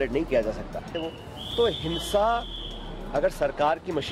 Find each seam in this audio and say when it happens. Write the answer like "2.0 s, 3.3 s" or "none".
0.9 s